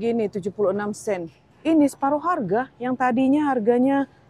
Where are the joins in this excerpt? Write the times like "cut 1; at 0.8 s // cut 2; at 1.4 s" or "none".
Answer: cut 1; at 1.5 s